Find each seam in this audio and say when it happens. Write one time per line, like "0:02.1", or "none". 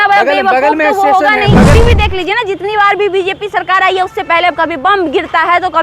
0:01.8